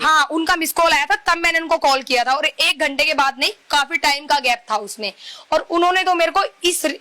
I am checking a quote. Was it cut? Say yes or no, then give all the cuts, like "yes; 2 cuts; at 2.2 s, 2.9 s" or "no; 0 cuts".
no; 0 cuts